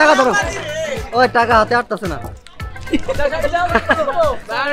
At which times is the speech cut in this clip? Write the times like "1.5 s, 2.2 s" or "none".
none